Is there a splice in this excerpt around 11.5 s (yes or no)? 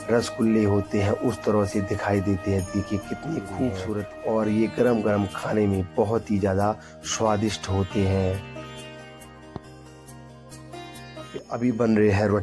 yes